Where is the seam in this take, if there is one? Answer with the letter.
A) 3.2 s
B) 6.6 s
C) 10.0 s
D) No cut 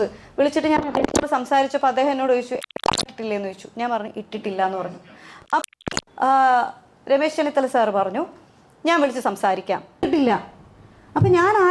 C